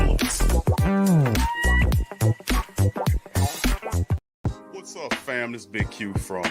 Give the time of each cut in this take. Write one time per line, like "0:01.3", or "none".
0:04.2